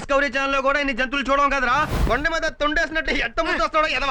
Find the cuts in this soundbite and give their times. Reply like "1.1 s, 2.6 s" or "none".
1.9 s